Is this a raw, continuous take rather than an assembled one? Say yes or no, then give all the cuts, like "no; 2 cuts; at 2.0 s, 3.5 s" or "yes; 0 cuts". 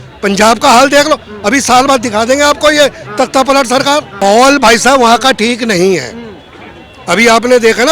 no; 1 cut; at 4.2 s